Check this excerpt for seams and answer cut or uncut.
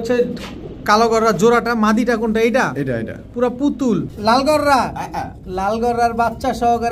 cut